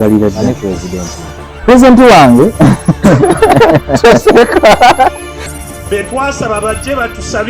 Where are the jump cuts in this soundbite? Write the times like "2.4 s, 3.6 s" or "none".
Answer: none